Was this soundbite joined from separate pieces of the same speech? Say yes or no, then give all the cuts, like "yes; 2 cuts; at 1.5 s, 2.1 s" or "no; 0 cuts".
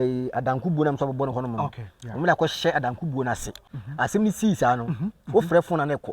yes; 1 cut; at 3.6 s